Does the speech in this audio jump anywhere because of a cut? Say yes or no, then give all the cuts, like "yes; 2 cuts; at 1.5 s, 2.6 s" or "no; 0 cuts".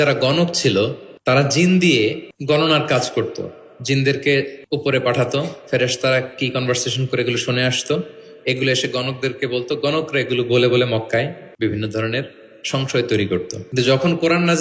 yes; 5 cuts; at 1.1 s, 2.3 s, 4.6 s, 11.4 s, 13.6 s